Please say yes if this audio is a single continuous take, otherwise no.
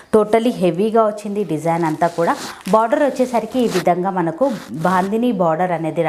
yes